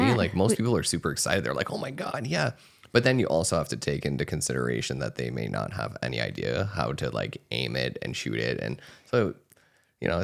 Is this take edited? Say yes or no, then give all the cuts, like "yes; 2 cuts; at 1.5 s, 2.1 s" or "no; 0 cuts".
no; 0 cuts